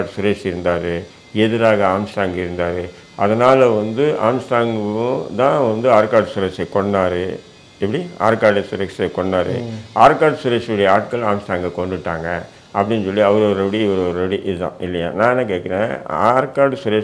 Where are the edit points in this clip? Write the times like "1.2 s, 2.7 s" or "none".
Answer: none